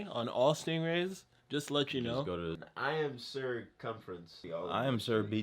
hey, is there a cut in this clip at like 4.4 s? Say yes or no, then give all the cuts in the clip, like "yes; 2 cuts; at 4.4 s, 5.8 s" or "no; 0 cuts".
yes; 2 cuts; at 2.6 s, 4.4 s